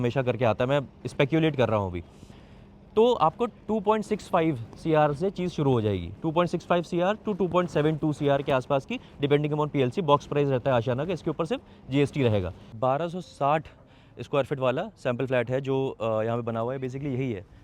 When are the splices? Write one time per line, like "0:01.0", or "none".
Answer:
0:12.6